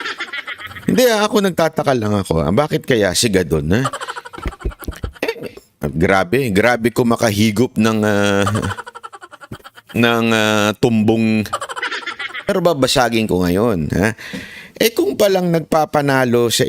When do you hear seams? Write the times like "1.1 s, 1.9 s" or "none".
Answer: 12.5 s